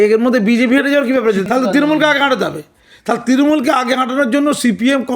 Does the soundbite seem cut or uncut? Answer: cut